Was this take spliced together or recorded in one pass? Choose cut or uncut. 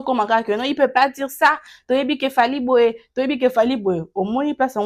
uncut